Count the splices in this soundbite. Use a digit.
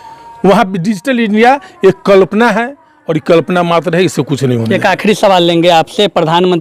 0